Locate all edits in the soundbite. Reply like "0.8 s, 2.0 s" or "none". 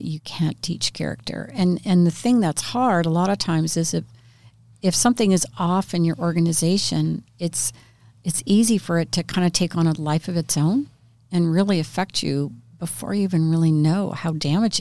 none